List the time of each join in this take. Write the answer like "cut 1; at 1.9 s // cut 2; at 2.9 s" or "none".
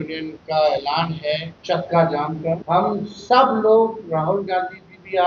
cut 1; at 1.5 s // cut 2; at 2.6 s